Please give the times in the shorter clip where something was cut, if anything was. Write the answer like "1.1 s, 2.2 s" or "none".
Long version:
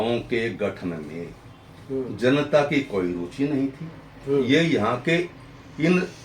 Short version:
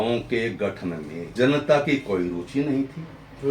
1.3 s